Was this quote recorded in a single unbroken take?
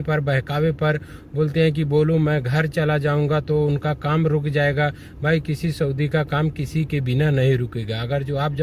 yes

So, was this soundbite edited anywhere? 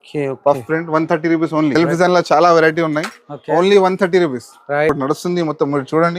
yes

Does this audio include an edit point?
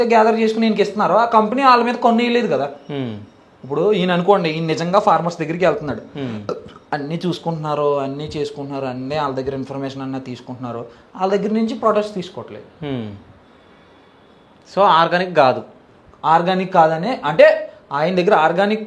no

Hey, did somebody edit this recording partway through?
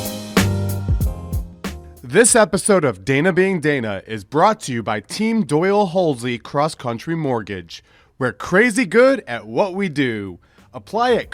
no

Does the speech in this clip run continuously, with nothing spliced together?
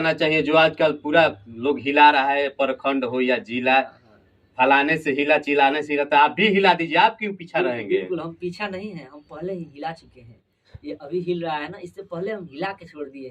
yes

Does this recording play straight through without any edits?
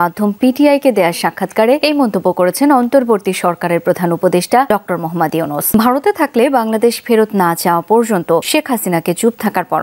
no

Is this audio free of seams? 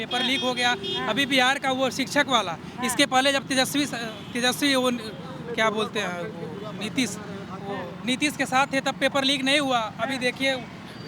yes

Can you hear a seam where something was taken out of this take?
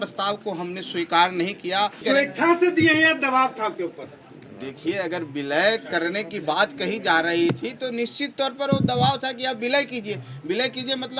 yes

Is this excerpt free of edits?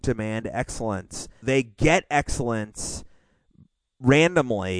no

